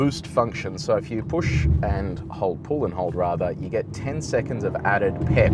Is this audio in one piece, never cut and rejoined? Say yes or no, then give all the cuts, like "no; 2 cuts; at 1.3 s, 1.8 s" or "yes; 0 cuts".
yes; 0 cuts